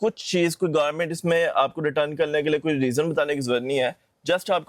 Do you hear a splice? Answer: no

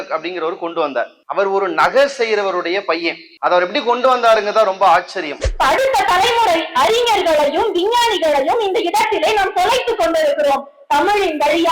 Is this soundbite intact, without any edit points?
no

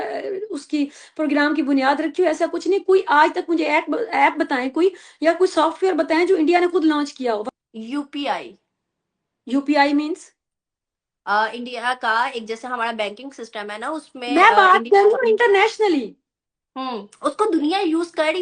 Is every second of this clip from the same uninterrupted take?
no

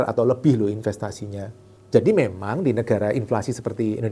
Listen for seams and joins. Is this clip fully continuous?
yes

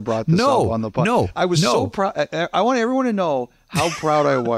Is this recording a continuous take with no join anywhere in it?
yes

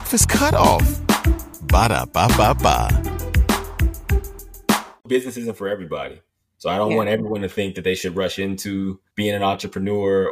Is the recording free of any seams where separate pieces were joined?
no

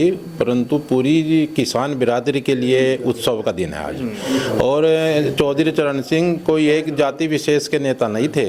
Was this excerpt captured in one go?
yes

